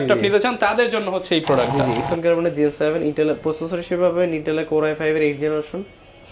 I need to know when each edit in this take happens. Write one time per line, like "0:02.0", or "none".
0:02.0